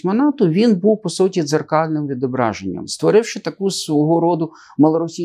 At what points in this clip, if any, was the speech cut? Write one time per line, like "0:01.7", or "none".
0:02.9